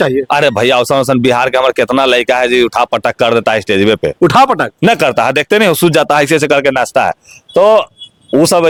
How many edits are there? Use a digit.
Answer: 0